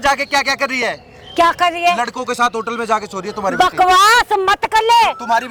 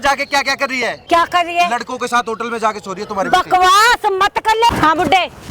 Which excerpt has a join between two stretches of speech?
second; 2 cuts; at 1.0 s, 4.7 s

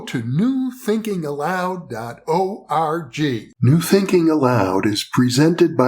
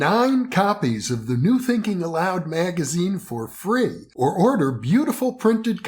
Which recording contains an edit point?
first; 1 cut; at 3.5 s

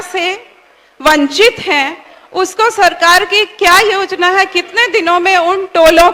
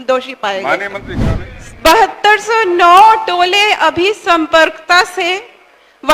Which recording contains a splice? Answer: second; 1 cut; at 1.1 s

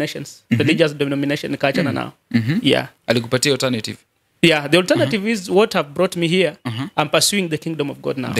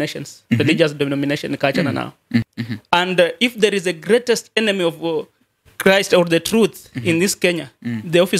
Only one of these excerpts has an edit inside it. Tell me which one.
second; 1 cut; at 2.5 s

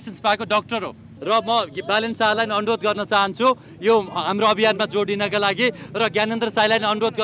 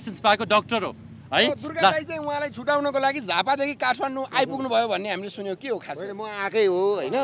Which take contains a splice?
first; 1 cut; at 1.1 s

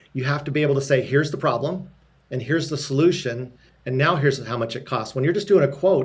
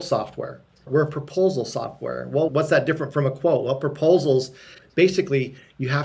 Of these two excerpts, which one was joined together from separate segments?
second; 2 cuts; at 0.8 s, 2.5 s

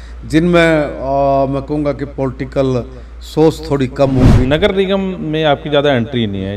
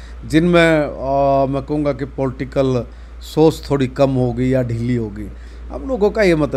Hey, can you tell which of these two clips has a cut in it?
first; 1 cut; at 4.4 s

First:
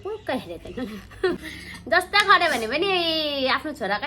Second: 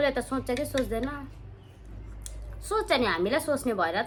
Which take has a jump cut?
first; 1 cut; at 1.4 s

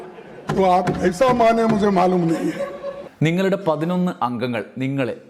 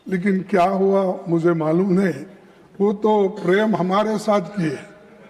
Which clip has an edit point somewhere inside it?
first; 1 cut; at 3.0 s

